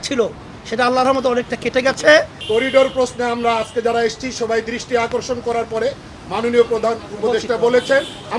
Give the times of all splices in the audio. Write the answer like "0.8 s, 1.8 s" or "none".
2.4 s